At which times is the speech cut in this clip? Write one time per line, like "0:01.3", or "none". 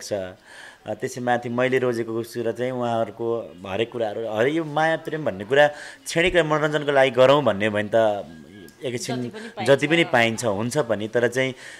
none